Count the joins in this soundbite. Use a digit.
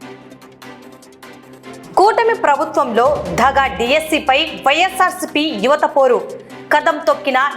1